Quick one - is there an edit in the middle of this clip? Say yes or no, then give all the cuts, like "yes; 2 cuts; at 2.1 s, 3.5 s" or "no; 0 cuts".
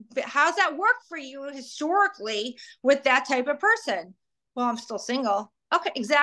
no; 0 cuts